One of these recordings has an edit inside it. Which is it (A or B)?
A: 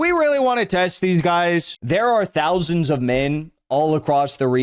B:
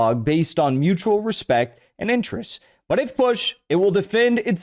A